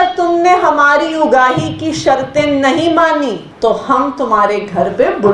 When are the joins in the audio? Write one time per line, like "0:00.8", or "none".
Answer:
0:03.5